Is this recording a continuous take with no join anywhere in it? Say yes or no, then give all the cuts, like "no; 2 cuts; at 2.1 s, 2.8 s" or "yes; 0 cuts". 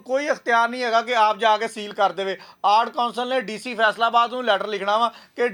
yes; 0 cuts